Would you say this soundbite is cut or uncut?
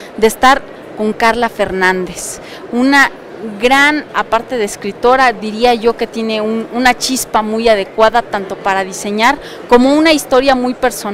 cut